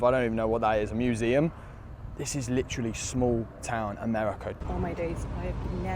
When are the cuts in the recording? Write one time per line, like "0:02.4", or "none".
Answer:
0:04.5